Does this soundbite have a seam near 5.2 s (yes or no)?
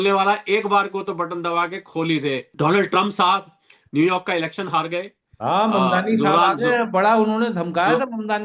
no